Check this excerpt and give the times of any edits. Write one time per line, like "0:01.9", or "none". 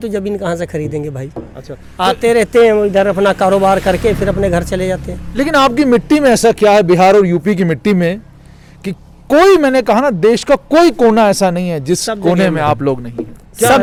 none